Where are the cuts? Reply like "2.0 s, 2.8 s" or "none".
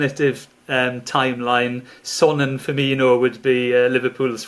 none